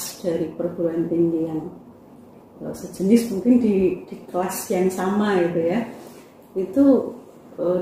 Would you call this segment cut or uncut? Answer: uncut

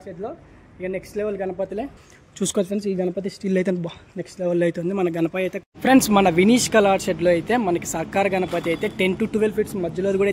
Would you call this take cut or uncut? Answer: cut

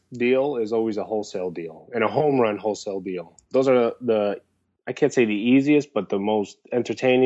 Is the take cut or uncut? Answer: cut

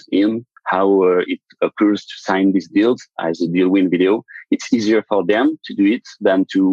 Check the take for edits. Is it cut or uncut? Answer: uncut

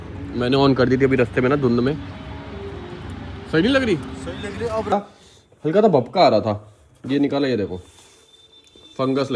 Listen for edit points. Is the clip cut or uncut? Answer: cut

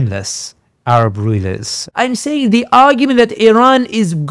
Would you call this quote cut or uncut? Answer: cut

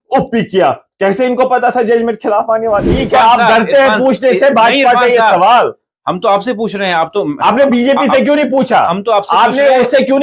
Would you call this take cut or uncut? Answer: cut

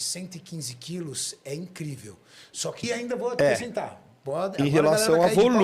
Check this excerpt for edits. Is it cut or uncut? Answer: cut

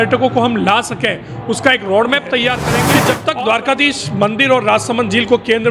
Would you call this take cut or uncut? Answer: cut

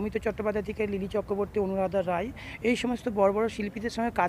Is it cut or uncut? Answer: uncut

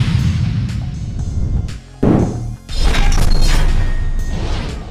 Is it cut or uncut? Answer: uncut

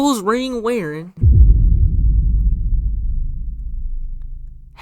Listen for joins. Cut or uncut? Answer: cut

